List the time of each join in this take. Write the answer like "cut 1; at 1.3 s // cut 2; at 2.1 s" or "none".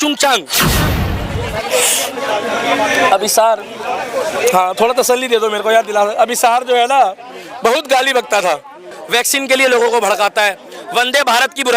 cut 1; at 0.9 s // cut 2; at 8.9 s